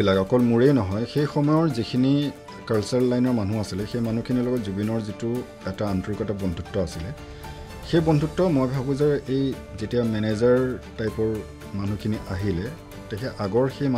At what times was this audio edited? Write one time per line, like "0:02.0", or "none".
none